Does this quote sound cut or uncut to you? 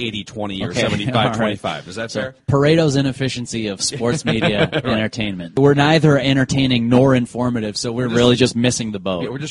cut